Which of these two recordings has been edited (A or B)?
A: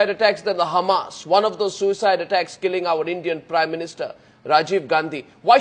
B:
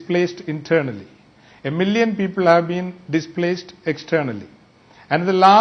B